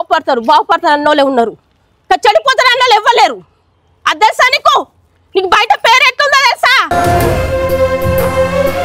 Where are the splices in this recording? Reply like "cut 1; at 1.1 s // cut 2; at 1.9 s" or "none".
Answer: none